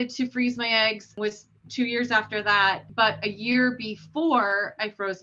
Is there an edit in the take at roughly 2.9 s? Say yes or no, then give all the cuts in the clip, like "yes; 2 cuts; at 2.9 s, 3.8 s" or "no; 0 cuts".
yes; 2 cuts; at 1.1 s, 2.9 s